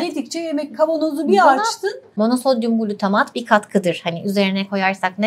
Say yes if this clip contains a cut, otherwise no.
yes